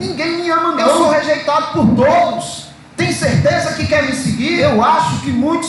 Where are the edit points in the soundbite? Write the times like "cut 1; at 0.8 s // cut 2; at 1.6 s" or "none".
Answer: cut 1; at 1.0 s // cut 2; at 4.6 s